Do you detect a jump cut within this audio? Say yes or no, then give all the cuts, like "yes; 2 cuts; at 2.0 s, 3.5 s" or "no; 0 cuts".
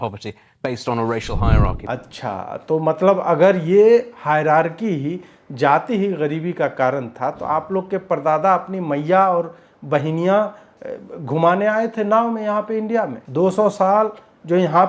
yes; 2 cuts; at 1.8 s, 13.2 s